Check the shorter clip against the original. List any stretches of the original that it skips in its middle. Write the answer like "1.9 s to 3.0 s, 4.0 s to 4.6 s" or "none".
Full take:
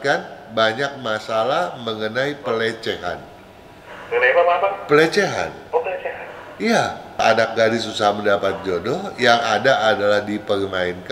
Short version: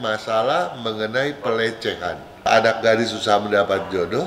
3.3 s to 7.0 s